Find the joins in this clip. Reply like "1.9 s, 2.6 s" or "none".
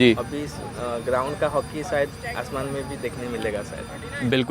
none